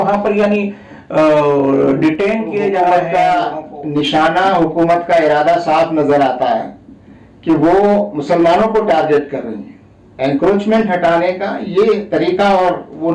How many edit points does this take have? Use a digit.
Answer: 1